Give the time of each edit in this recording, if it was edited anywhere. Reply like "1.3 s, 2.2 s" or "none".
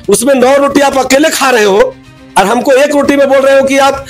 none